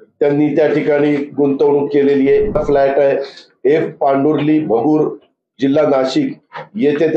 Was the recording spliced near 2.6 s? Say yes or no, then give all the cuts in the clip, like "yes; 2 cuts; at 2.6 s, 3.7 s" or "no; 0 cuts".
yes; 1 cut; at 2.6 s